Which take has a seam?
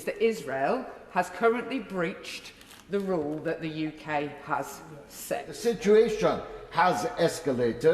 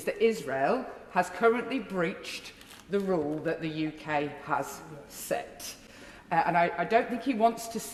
first; 1 cut; at 5.5 s

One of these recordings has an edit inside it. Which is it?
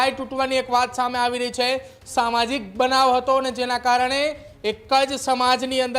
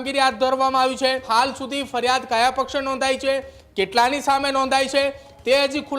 second; 1 cut; at 1.3 s

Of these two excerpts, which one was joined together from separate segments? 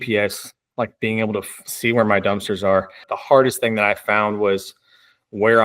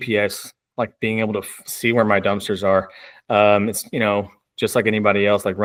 first; 1 cut; at 3.1 s

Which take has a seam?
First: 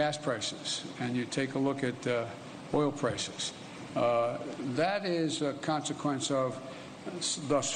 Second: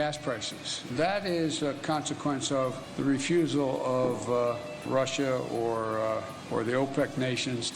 second; 4 cuts; at 0.9 s, 2.8 s, 4.8 s, 6.4 s

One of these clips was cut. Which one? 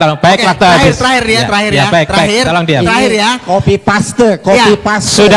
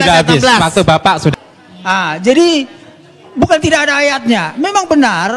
second; 1 cut; at 1.3 s

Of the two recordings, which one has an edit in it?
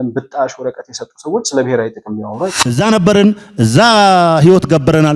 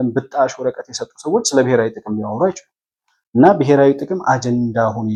first; 1 cut; at 2.6 s

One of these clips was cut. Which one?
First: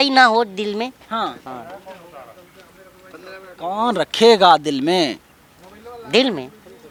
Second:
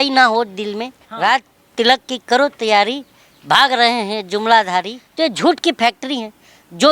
second; 2 cuts; at 1.0 s, 5.0 s

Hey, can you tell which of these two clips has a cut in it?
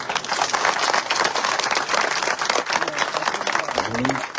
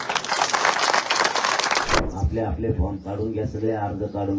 second; 1 cut; at 2.0 s

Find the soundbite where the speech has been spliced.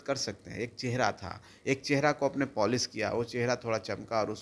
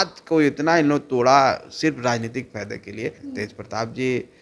second; 1 cut; at 3.2 s

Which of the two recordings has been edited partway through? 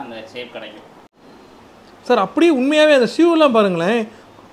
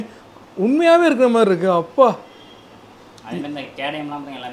first; 1 cut; at 1.1 s

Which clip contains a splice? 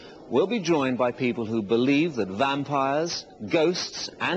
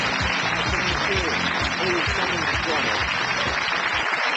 first; 1 cut; at 3.1 s

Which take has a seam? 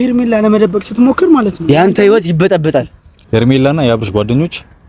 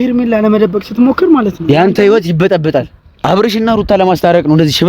second; 1 cut; at 3.2 s

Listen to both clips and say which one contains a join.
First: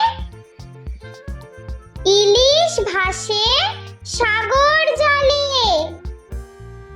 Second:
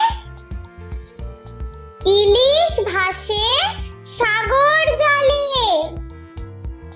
first; 1 cut; at 6.0 s

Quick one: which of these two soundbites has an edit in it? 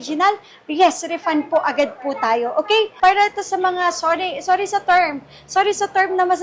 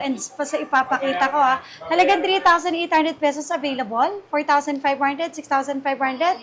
first; 1 cut; at 2.9 s

